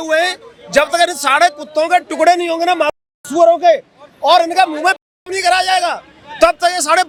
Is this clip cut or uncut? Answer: uncut